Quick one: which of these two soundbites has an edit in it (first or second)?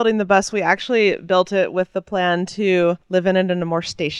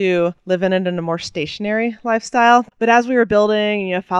second